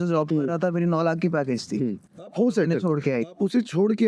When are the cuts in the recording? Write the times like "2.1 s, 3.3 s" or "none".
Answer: none